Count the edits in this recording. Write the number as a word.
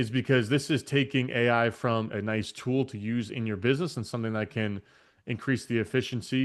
zero